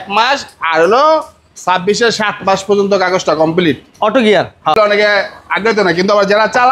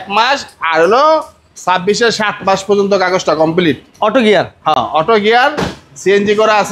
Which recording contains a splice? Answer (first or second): first